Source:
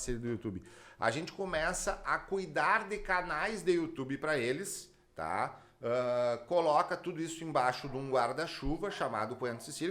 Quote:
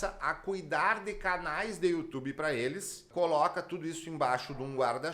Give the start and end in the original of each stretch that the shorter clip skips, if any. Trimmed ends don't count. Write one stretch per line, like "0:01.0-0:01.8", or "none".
0:04.9-0:06.4